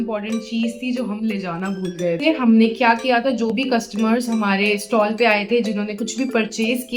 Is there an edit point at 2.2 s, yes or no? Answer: yes